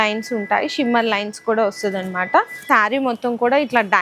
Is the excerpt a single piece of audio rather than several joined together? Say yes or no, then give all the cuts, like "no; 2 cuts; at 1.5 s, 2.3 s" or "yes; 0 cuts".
no; 1 cut; at 2.6 s